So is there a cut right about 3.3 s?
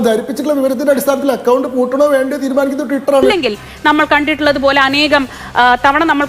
yes; 1 cut; at 3.3 s

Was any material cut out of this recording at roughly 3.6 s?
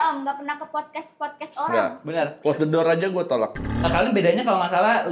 yes; 1 cut; at 3.6 s

